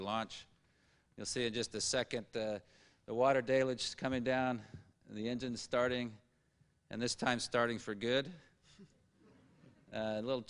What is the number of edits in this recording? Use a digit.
1